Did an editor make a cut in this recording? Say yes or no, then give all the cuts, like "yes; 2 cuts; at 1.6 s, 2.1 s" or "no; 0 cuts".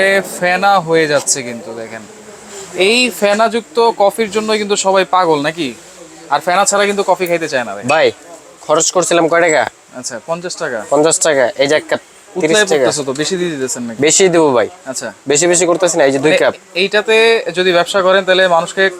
no; 0 cuts